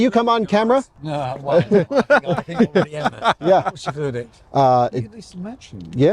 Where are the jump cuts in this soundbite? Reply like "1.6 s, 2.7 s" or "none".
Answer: 1.1 s